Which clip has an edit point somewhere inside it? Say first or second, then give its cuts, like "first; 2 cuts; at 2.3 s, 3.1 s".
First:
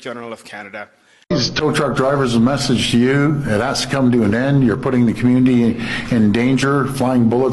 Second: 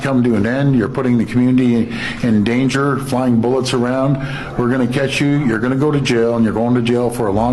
first; 1 cut; at 1.2 s